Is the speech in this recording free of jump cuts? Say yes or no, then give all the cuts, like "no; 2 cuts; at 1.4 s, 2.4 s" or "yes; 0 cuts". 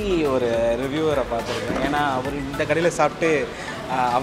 yes; 0 cuts